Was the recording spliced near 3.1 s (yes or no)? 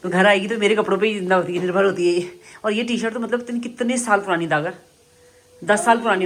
no